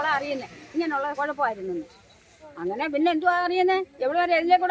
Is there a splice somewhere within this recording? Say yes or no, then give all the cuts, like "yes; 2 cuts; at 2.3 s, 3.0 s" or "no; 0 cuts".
no; 0 cuts